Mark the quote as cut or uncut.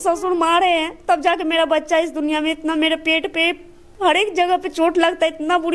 uncut